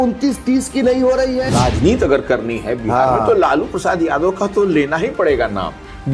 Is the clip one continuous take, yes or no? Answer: no